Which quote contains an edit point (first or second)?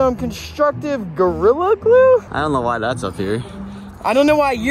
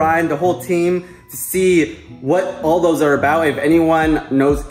first